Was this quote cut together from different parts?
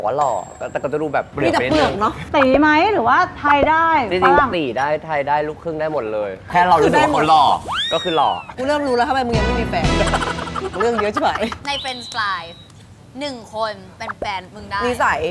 yes; 6 cuts; at 2.2 s, 6.5 s, 8.5 s, 10.8 s, 11.6 s, 14.0 s

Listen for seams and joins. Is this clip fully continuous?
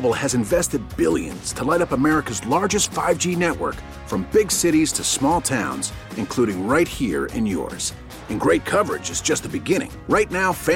yes; 0 cuts

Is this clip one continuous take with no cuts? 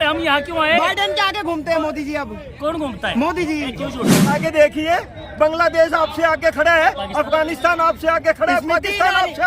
no; 1 cut; at 4.3 s

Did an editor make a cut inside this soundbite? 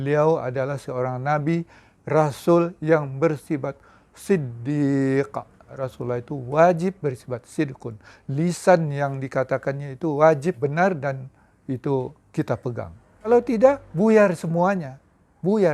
yes; 1 cut; at 13.9 s

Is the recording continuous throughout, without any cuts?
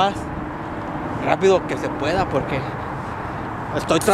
yes; 0 cuts

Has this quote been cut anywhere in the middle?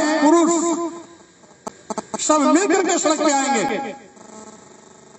no; 0 cuts

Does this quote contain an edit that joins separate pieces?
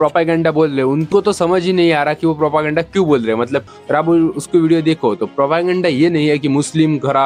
no; 0 cuts

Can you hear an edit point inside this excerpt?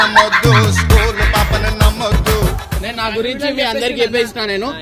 yes; 1 cut; at 2.7 s

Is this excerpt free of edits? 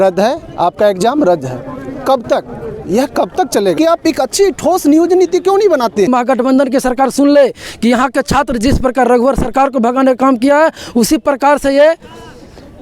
no; 2 cuts; at 3.7 s, 6.1 s

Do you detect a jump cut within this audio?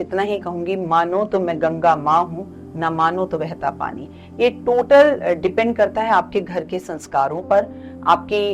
no; 0 cuts

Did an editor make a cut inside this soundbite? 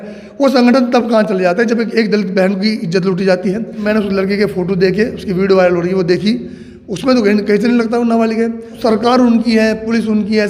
yes; 2 cuts; at 3.8 s, 8.7 s

